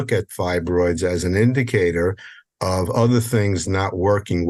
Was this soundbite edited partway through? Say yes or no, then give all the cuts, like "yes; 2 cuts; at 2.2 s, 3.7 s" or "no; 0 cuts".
no; 0 cuts